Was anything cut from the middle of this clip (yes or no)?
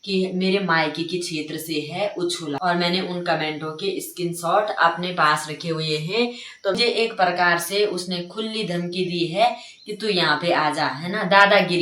yes